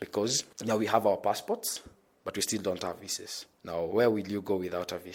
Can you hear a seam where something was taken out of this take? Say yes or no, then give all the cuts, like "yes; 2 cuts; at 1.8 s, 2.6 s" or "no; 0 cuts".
no; 0 cuts